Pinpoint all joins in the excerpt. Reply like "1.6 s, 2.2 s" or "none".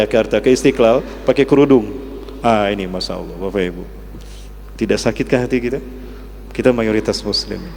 none